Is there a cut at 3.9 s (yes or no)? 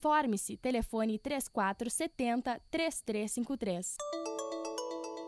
yes